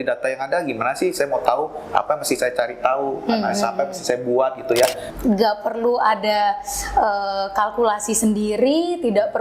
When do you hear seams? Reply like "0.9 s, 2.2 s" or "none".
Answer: 5.0 s